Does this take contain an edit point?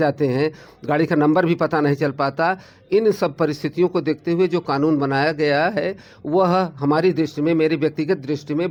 no; 0 cuts

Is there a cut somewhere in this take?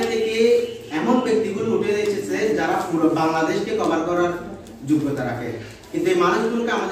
no; 0 cuts

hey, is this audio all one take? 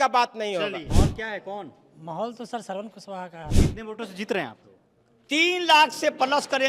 no; 2 cuts; at 0.9 s, 3.6 s

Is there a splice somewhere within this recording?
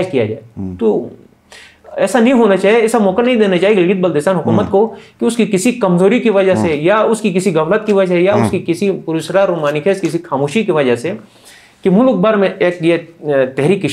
no; 0 cuts

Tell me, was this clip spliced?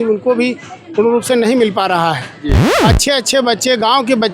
yes; 1 cut; at 2.7 s

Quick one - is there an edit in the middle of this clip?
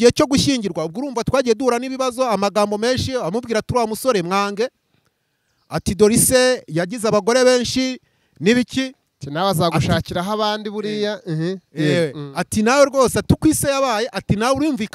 no; 0 cuts

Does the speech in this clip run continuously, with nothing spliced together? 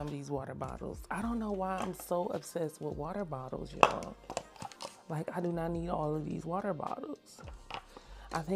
yes; 0 cuts

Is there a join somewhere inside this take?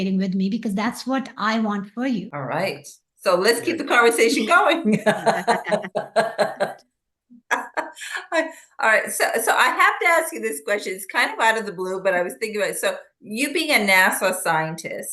yes; 1 cut; at 2.3 s

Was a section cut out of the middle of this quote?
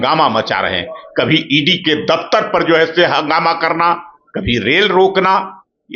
no; 0 cuts

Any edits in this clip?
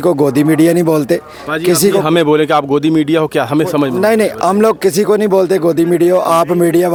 no; 0 cuts

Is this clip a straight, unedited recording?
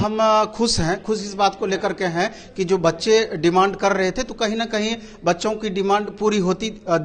yes; 0 cuts

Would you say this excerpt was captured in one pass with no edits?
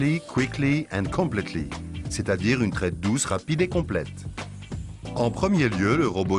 no; 1 cut; at 4.8 s

